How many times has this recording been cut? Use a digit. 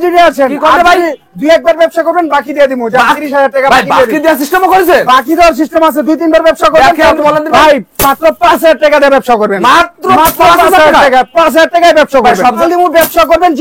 2